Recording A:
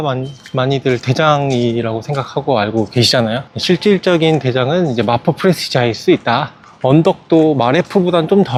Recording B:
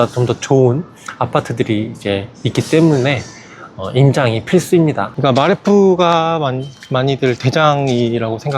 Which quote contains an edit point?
B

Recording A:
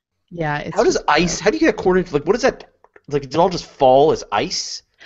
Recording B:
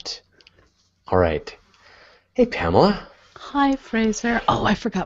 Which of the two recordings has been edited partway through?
A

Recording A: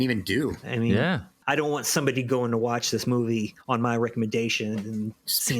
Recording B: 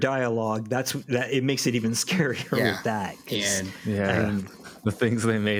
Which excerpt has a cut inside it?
A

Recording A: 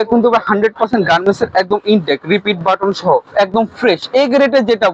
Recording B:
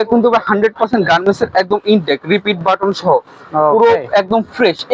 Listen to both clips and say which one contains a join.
A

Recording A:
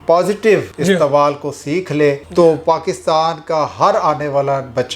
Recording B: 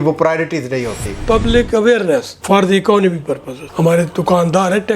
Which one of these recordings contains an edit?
B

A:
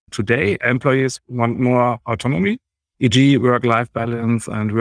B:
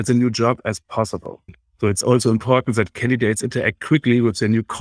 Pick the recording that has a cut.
B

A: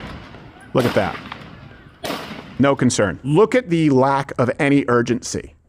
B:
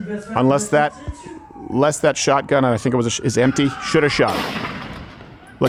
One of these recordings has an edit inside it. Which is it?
A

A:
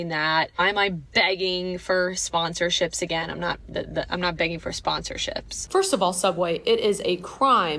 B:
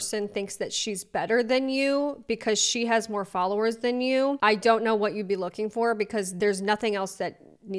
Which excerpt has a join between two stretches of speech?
A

